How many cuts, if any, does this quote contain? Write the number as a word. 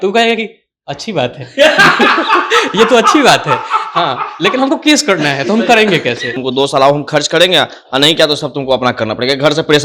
one